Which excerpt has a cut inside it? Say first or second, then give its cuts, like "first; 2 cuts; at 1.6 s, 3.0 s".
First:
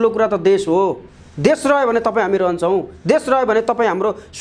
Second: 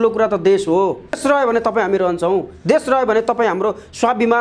second; 1 cut; at 1.2 s